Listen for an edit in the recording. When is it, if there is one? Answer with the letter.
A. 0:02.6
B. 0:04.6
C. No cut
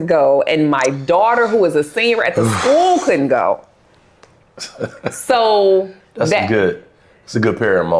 C